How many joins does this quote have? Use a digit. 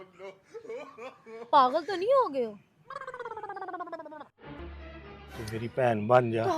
3